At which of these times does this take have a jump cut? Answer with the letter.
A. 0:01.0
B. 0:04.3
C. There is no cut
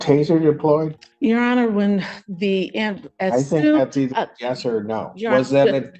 A